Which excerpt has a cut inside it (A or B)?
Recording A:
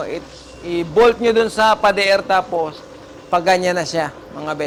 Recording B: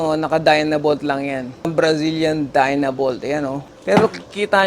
B